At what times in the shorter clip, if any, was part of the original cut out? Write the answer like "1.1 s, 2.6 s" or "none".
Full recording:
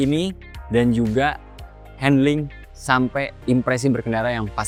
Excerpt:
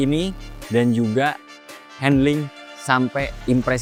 none

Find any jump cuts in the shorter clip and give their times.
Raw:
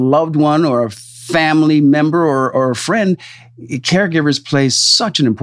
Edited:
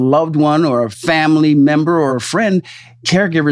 1.0 s, 2.3 s

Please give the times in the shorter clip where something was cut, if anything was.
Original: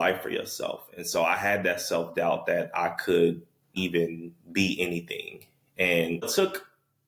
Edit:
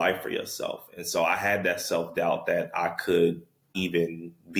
none

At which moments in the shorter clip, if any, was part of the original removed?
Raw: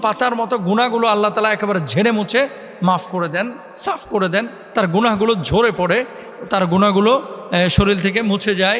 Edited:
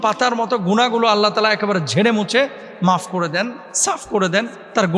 none

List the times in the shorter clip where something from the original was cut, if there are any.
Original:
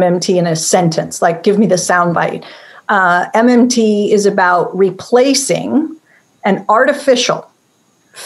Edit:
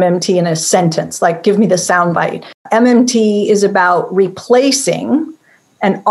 2.6 s

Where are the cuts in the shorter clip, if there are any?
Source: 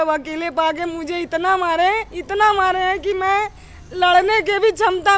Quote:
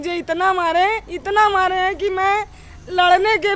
none

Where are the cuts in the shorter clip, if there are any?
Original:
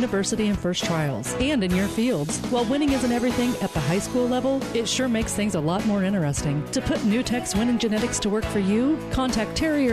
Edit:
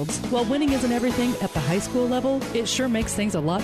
none

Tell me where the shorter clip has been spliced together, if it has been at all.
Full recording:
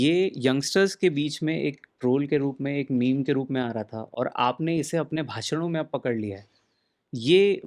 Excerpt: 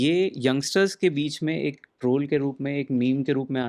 none

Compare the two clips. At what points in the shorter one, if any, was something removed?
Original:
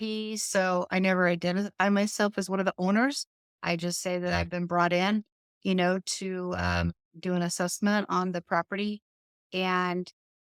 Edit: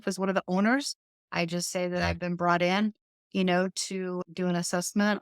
4.2 s

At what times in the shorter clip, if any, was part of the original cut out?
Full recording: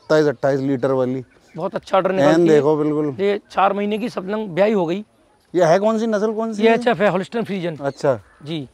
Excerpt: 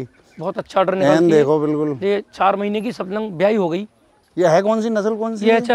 none

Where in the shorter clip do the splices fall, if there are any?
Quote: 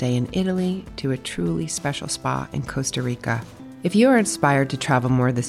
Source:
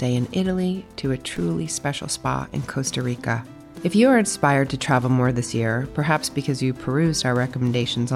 none

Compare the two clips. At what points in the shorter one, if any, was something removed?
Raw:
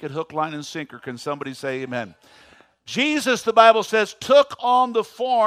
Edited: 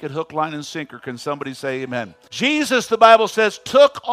2.2 s

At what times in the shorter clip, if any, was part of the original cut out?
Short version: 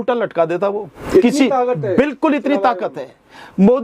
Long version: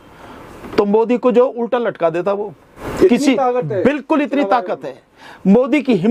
0.9 s

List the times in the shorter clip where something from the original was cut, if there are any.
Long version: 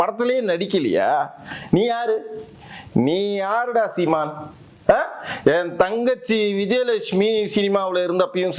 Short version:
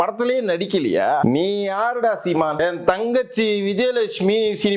1.2 s, 2.6 s

